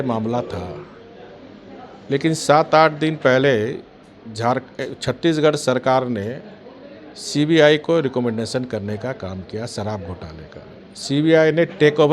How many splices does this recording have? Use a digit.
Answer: 0